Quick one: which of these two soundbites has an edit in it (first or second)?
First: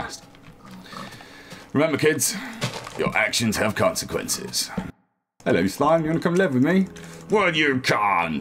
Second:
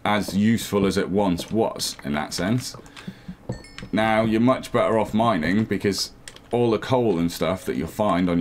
first